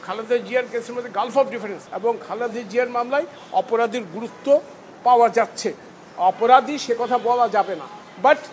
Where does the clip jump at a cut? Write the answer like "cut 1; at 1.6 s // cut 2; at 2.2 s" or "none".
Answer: cut 1; at 1.8 s

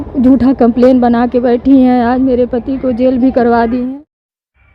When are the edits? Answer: cut 1; at 3.9 s

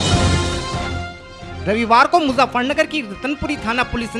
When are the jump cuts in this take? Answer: none

